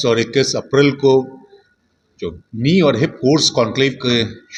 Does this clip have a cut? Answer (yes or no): no